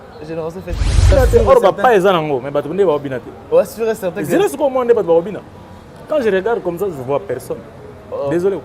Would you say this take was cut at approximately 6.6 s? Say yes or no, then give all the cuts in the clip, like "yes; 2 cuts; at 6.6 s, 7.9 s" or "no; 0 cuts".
no; 1 cut; at 1.1 s